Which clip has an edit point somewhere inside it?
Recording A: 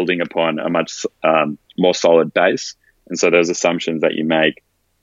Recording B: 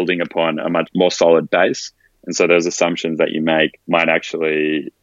B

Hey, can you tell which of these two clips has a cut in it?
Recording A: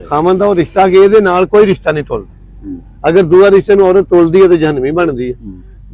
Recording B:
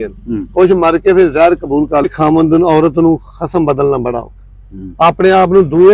B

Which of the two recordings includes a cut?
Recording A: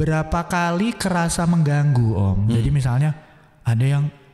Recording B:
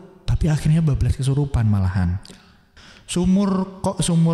B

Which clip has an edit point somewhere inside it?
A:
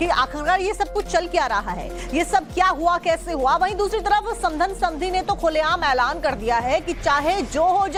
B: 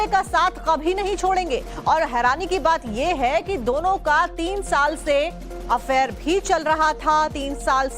B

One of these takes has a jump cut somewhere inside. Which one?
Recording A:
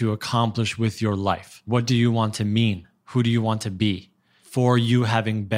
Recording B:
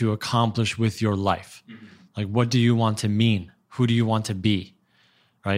A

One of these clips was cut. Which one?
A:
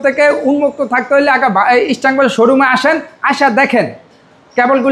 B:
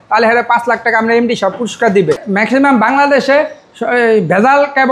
B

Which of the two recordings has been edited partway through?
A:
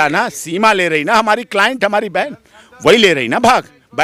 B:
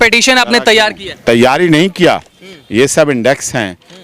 B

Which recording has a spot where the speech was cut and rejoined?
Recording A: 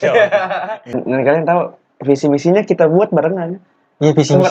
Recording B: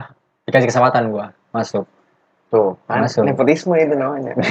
A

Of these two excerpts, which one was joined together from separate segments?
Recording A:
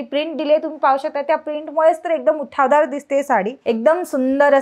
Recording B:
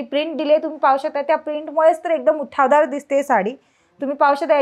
A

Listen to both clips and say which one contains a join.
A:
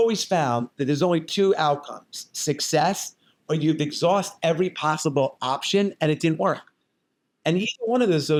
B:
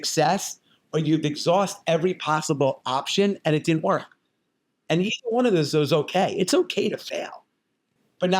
B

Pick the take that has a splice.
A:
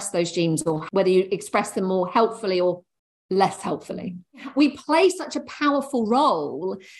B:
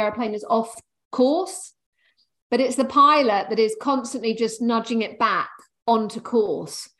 A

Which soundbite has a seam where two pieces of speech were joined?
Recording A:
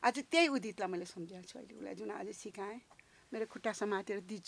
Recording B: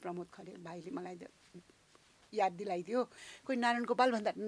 B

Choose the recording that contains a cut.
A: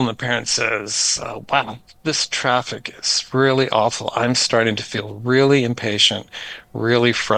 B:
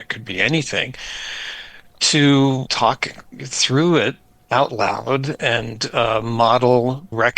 B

